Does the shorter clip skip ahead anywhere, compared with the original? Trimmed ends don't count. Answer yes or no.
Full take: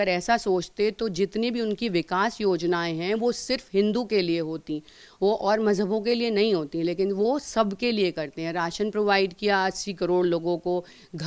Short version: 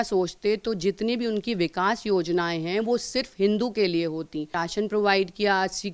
yes